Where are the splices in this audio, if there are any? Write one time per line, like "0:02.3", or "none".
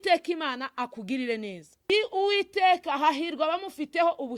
0:01.9